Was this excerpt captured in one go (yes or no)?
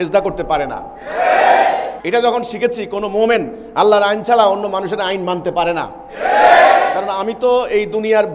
no